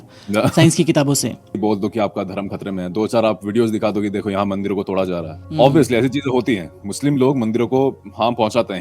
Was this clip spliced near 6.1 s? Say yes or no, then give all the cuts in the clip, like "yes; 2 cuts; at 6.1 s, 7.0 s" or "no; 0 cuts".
no; 1 cut; at 1.6 s